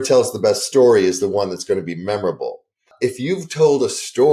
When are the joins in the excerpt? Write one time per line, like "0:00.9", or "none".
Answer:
0:02.9

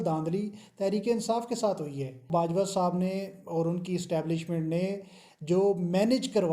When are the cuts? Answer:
0:02.3

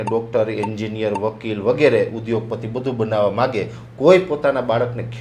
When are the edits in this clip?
none

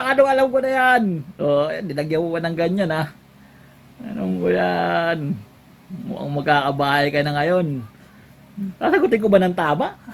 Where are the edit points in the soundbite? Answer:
none

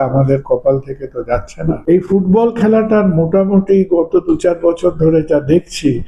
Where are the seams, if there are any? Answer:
0:01.8

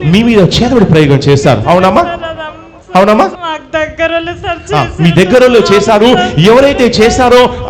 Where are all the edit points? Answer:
0:03.4

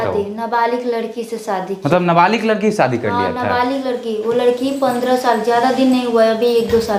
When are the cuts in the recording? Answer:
none

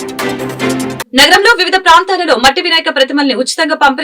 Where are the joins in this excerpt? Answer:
0:01.0

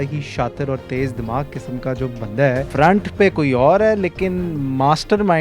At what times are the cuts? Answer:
0:02.7

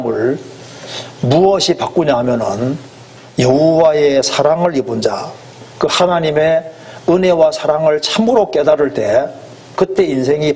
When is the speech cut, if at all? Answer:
none

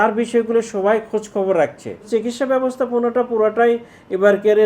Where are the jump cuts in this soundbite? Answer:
0:02.1

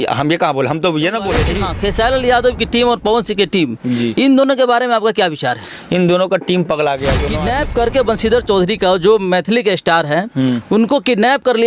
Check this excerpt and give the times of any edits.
0:01.5
0:07.3

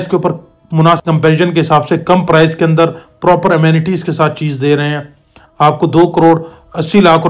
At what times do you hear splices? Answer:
0:01.0

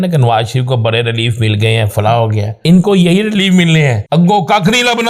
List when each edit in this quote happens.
0:02.5
0:04.0

